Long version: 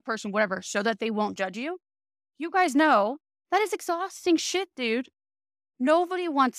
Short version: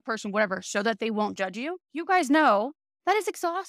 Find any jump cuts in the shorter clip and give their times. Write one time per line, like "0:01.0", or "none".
0:01.8